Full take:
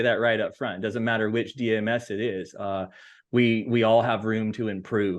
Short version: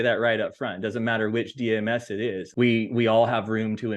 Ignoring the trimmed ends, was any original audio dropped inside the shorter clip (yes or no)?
yes